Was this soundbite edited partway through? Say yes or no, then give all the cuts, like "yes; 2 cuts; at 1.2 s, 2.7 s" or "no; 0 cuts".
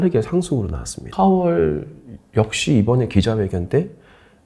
yes; 1 cut; at 1.1 s